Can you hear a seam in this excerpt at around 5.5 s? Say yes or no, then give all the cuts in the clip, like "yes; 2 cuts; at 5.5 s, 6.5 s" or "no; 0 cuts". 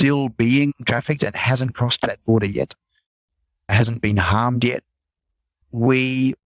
yes; 2 cuts; at 3.7 s, 5.5 s